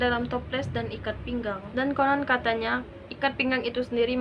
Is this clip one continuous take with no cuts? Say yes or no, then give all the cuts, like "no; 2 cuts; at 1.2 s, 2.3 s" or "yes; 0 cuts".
no; 1 cut; at 1.6 s